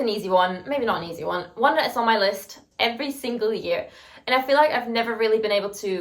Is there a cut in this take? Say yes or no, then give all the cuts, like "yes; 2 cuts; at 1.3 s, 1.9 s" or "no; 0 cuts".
no; 0 cuts